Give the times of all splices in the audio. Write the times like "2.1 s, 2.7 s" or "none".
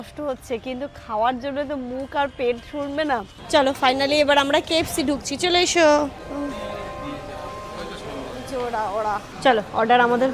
3.4 s, 9.3 s